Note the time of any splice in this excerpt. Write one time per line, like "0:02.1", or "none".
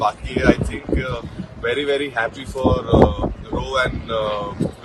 none